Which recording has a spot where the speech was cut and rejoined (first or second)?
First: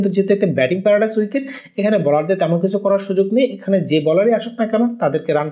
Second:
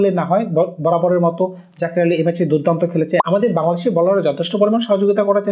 second